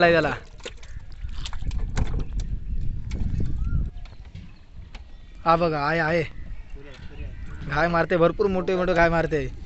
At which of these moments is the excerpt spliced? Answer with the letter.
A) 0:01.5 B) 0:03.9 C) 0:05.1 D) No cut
B